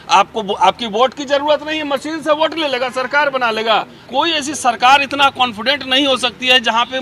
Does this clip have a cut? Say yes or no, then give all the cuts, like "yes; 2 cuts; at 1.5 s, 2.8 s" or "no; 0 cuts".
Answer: yes; 1 cut; at 4.0 s